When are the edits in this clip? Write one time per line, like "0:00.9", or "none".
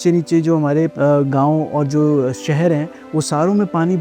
0:00.9